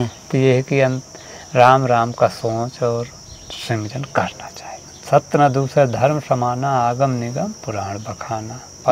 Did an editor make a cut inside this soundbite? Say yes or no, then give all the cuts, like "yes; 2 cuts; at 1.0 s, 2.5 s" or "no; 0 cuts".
yes; 1 cut; at 5.0 s